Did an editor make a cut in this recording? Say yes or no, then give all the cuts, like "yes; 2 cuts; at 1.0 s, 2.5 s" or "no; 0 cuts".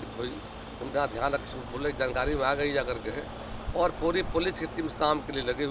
no; 0 cuts